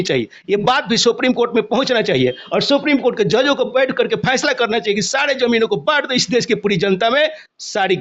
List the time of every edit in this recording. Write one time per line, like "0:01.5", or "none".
none

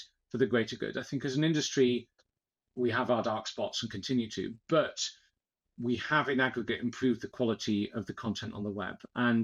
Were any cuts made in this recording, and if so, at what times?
none

